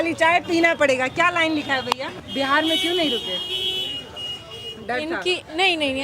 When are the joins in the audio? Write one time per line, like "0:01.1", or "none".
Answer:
0:02.2